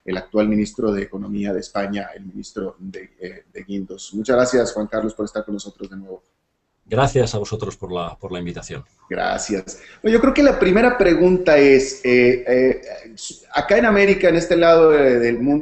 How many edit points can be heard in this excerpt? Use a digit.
0